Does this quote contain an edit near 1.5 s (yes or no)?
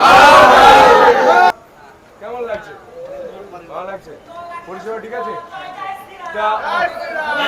yes